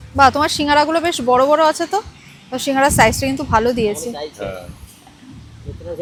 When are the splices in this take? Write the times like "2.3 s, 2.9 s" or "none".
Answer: none